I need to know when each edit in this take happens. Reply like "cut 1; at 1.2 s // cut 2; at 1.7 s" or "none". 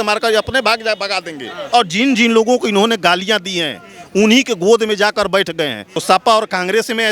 cut 1; at 1.6 s // cut 2; at 5.9 s